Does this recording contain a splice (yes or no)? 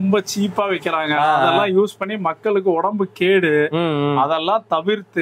no